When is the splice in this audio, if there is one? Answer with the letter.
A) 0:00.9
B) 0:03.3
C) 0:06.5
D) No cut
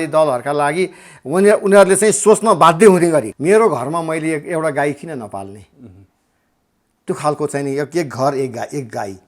B